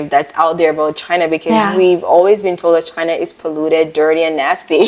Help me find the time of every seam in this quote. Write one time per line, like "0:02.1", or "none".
none

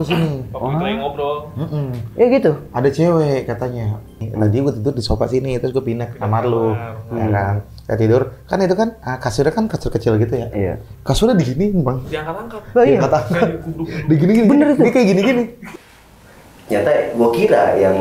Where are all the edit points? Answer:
0:04.2
0:15.7

